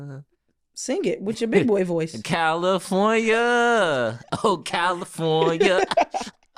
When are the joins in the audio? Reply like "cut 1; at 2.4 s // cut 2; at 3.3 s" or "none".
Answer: none